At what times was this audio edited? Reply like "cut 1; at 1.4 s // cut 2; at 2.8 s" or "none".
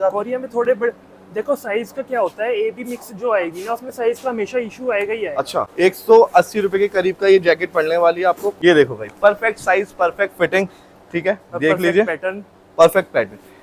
cut 1; at 5.7 s // cut 2; at 8.5 s